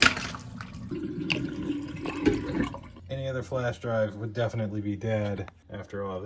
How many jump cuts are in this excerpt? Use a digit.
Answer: 0